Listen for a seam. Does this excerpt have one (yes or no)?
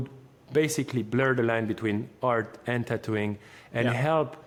no